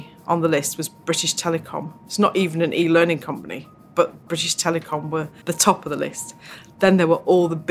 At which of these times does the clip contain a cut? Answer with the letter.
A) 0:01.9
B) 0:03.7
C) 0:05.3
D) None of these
C